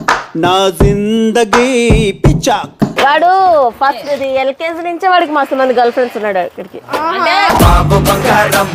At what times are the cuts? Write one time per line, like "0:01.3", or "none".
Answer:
0:02.9